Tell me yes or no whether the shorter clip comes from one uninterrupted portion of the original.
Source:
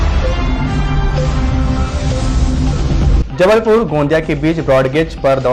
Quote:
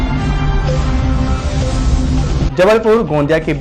no